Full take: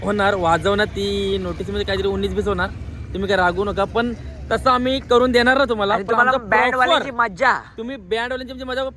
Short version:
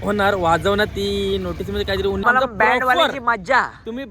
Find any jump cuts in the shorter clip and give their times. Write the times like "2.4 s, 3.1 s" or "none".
2.2 s